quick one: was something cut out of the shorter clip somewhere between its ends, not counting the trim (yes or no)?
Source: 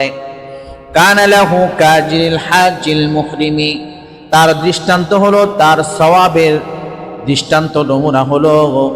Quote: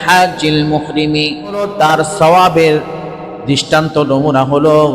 yes